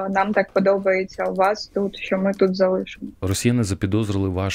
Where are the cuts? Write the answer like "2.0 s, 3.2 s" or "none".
3.2 s